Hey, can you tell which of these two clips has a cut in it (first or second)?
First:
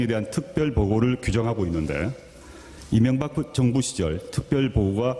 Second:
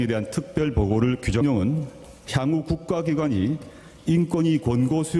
first